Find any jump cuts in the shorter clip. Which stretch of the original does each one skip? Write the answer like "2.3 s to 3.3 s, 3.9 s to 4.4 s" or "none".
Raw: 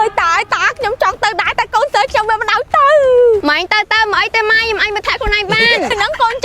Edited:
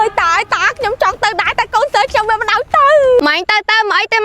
3.2 s to 3.4 s